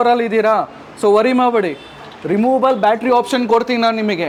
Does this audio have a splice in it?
no; 0 cuts

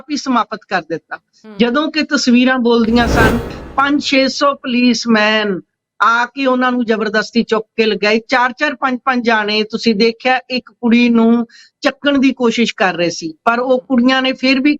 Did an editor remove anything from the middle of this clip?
yes; 1 cut; at 3.6 s

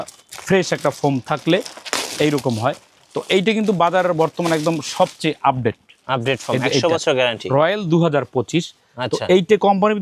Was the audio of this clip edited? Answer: no; 0 cuts

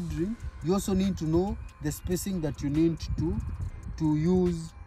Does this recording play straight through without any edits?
yes; 0 cuts

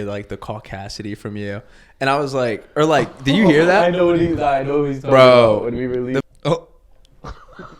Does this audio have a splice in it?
yes; 1 cut; at 6.2 s

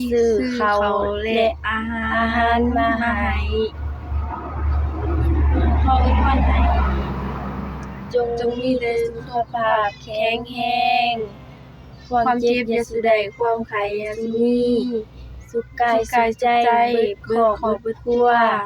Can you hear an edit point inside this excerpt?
no; 0 cuts

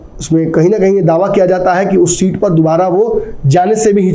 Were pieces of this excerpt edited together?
no; 0 cuts

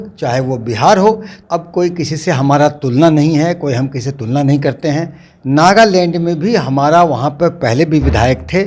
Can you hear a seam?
yes; 1 cut; at 1.3 s

